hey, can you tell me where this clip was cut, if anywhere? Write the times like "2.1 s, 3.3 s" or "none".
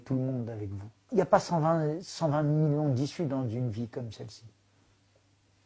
1.0 s